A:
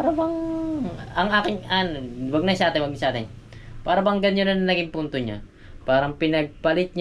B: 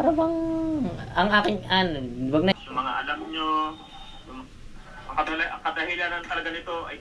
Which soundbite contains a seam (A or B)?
B